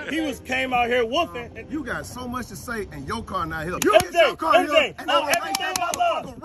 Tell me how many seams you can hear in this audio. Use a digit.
2